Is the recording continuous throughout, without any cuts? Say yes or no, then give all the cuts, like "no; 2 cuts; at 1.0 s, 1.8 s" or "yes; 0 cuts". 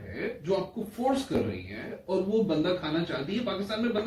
yes; 0 cuts